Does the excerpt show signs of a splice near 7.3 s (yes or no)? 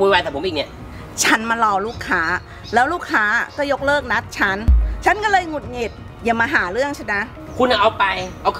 yes